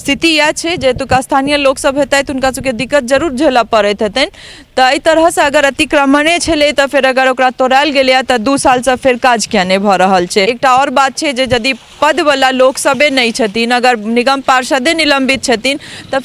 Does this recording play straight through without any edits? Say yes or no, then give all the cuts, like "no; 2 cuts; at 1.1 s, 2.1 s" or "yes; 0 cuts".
no; 1 cut; at 10.5 s